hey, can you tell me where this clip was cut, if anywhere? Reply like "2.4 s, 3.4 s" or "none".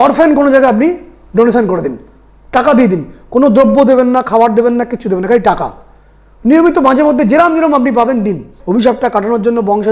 8.5 s